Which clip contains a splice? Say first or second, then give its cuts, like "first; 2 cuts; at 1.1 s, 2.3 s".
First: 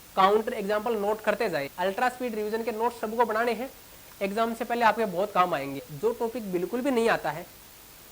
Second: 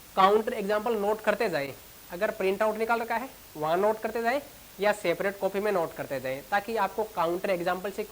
first; 2 cuts; at 1.7 s, 5.9 s